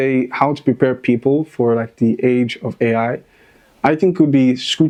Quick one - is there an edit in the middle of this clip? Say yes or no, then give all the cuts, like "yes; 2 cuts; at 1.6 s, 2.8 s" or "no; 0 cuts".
no; 0 cuts